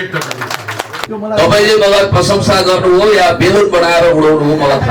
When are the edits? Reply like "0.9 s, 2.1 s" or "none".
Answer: 1.0 s